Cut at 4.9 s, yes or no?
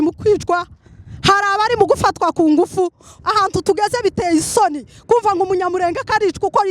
no